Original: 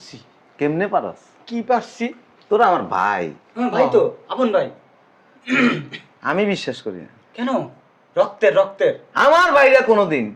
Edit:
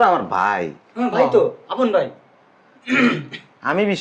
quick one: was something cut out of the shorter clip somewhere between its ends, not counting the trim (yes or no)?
no